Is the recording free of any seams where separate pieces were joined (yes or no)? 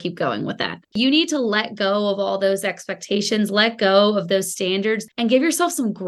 no